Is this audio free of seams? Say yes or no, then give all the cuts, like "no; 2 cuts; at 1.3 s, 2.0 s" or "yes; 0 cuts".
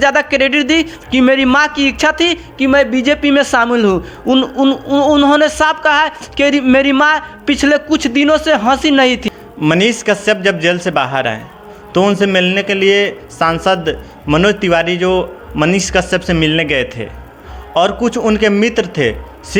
yes; 0 cuts